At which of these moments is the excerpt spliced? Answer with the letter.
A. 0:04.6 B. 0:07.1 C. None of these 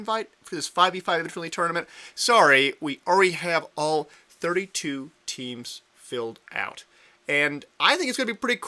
A